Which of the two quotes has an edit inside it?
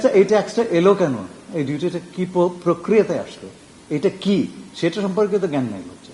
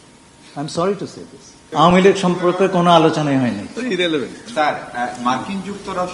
second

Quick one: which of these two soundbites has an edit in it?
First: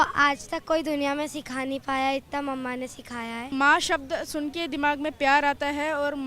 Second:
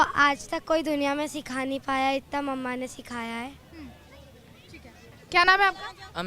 first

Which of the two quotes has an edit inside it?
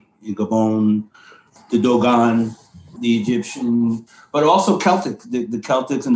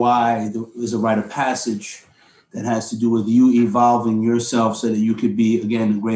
first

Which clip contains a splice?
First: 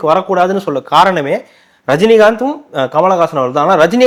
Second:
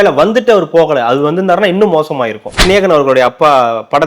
second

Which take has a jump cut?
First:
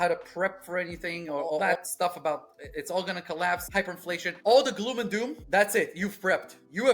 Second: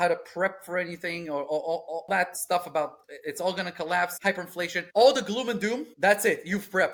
first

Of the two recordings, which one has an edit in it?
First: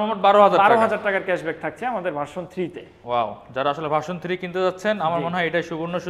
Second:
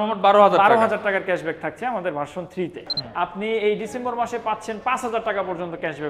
second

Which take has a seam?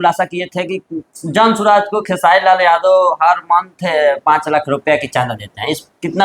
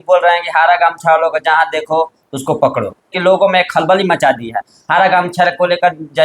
second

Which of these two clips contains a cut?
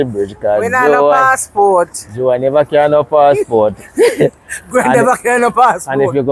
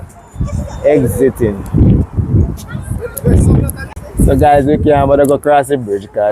second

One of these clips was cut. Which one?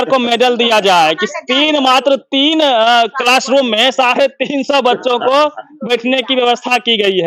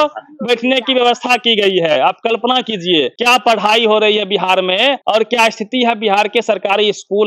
second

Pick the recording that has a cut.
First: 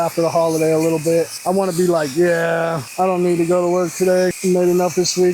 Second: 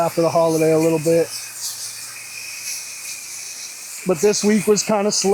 first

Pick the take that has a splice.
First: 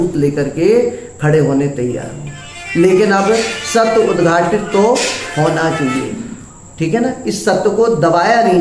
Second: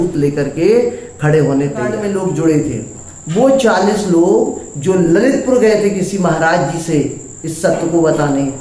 second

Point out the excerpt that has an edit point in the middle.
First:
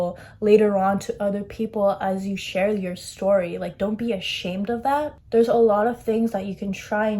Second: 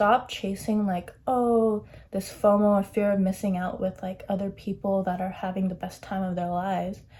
first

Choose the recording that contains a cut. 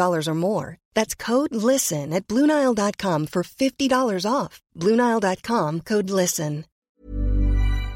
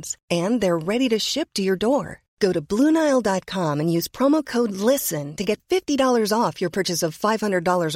first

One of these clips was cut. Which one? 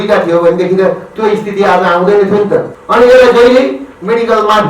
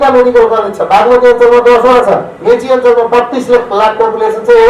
first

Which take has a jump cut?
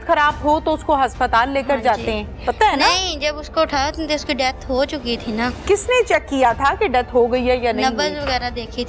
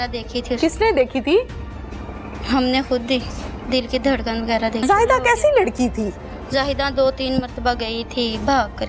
second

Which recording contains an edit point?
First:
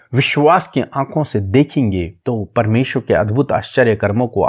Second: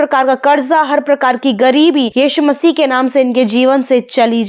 first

